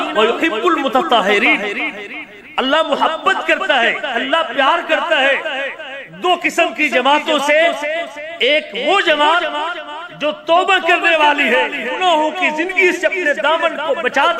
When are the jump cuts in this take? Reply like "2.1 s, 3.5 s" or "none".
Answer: none